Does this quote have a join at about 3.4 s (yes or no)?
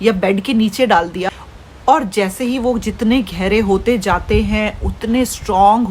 no